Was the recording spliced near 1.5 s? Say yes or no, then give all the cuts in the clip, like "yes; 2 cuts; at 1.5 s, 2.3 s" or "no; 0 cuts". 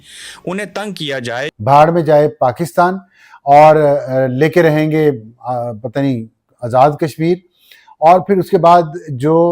yes; 1 cut; at 1.5 s